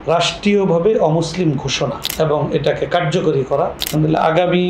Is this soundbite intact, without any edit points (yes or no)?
no